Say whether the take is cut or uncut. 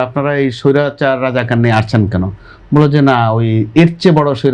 uncut